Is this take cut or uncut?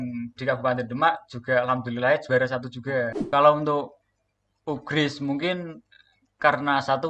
cut